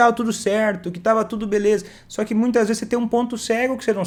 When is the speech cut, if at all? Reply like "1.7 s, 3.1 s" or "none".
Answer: none